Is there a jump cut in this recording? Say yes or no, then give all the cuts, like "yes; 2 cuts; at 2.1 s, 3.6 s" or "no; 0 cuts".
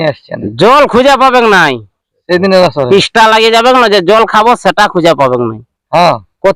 no; 0 cuts